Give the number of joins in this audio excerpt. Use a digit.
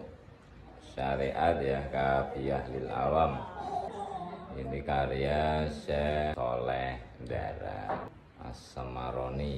2